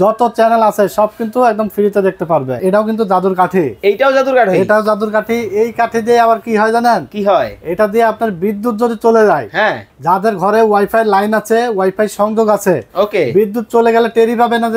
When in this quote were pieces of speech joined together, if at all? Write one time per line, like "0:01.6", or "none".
0:02.6

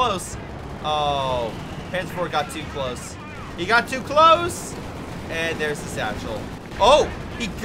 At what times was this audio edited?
0:06.6

